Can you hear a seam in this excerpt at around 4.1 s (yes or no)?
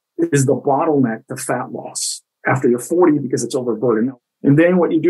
yes